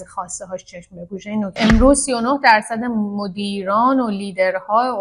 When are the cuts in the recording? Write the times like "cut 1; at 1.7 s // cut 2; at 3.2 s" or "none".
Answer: cut 1; at 1.5 s